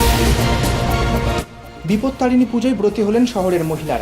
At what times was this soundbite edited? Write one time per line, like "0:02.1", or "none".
0:01.6

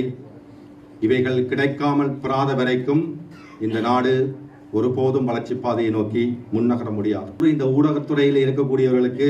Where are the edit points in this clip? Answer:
0:07.4

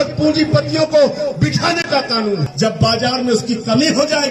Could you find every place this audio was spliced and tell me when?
0:02.5

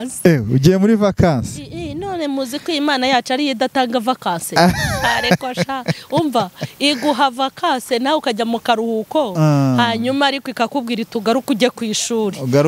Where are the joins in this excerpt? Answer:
none

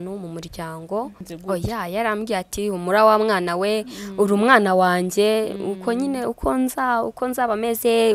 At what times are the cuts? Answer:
0:01.3

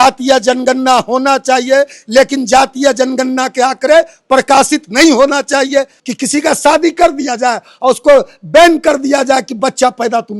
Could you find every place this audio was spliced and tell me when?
0:05.9

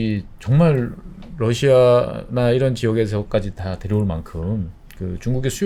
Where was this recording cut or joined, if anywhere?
none

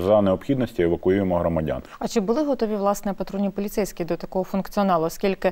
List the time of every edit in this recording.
none

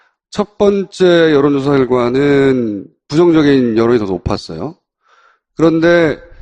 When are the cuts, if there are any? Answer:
none

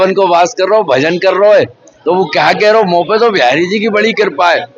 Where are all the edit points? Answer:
none

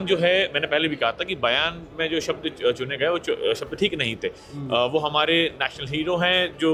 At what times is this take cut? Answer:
none

